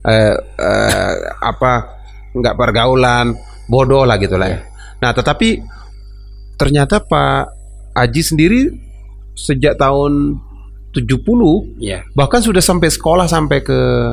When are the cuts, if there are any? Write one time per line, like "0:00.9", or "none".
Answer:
none